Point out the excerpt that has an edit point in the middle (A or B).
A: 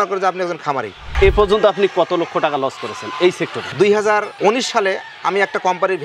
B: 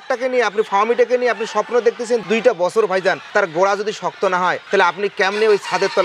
A